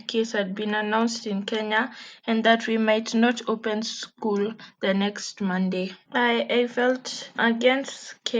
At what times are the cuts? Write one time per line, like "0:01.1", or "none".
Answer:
none